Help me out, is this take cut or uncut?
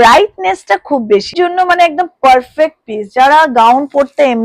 cut